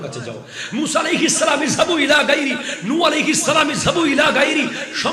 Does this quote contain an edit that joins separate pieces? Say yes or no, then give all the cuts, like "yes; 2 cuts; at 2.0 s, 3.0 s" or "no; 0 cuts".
no; 0 cuts